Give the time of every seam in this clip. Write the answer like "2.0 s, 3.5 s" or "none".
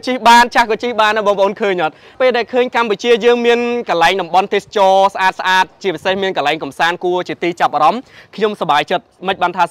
2.2 s